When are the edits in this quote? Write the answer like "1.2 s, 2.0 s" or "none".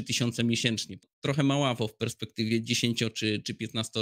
0.9 s

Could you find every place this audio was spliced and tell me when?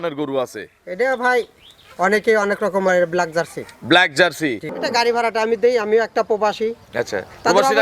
4.7 s

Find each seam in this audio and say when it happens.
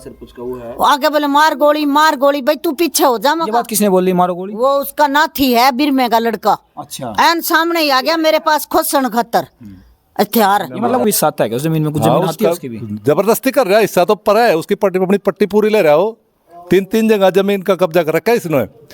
11.0 s

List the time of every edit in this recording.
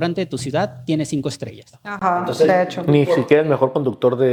none

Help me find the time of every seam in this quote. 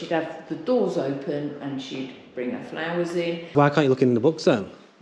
3.5 s

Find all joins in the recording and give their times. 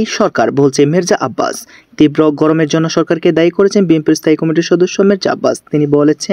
none

